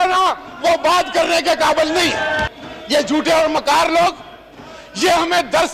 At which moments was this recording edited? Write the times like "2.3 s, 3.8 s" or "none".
2.4 s